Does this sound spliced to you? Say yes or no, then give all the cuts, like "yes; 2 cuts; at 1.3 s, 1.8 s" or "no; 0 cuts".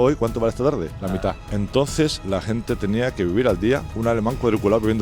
yes; 3 cuts; at 1.1 s, 2.2 s, 3.9 s